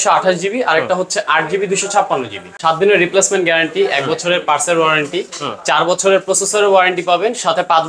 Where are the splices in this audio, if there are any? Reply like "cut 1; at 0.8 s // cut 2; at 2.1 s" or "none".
cut 1; at 2.5 s

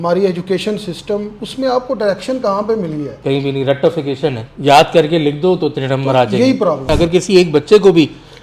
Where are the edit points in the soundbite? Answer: cut 1; at 6.9 s

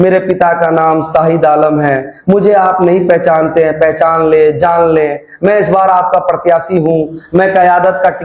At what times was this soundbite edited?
none

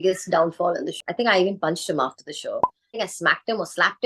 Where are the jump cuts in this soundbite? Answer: cut 1; at 0.9 s // cut 2; at 2.9 s

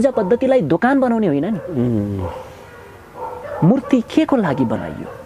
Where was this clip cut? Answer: none

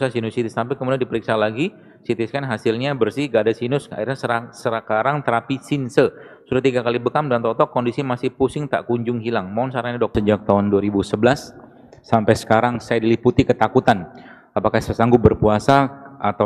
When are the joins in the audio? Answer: cut 1; at 10.1 s

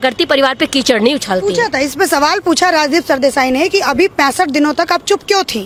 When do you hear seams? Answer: none

